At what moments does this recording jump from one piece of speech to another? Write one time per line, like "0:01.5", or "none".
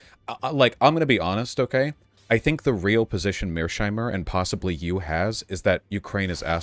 none